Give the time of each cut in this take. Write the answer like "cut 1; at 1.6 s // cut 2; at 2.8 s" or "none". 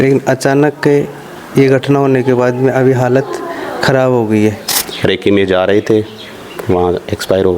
cut 1; at 4.7 s

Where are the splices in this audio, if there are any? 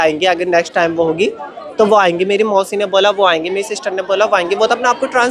none

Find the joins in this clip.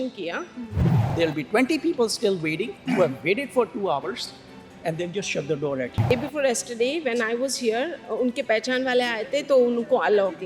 cut 1; at 1.0 s // cut 2; at 6.1 s

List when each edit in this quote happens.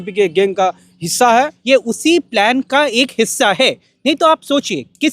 cut 1; at 1.6 s

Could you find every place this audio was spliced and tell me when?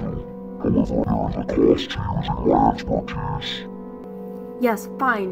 cut 1; at 1.0 s // cut 2; at 4.0 s

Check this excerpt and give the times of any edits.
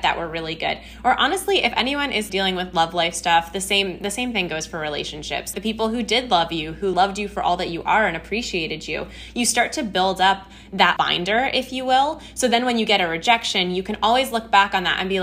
cut 1; at 2.3 s // cut 2; at 5.5 s // cut 3; at 6.9 s // cut 4; at 10.9 s

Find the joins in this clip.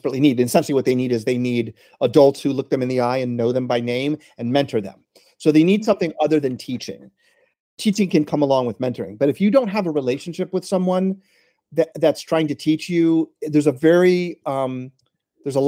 cut 1; at 7.7 s

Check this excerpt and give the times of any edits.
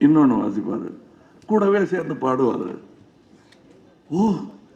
none

